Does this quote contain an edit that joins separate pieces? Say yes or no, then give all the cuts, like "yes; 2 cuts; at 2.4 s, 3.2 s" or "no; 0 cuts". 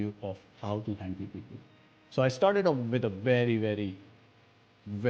yes; 1 cut; at 1.8 s